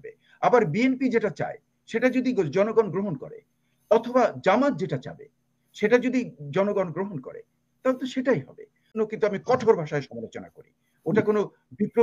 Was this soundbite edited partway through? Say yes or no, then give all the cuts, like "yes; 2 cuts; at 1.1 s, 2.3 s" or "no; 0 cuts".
yes; 1 cut; at 9.0 s